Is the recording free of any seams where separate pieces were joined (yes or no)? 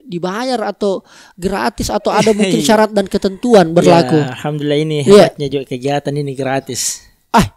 yes